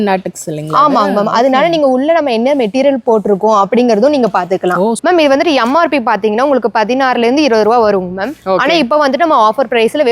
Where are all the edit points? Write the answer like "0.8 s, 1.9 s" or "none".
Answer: 5.0 s